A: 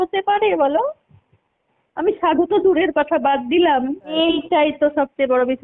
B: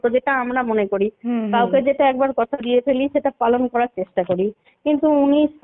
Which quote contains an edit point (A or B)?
A